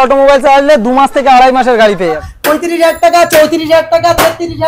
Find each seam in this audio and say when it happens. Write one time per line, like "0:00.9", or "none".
0:02.3